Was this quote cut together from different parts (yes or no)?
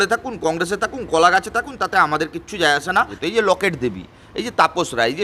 yes